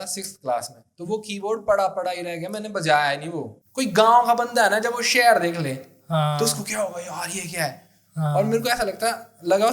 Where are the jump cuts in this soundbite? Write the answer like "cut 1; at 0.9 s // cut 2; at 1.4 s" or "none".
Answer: cut 1; at 3.5 s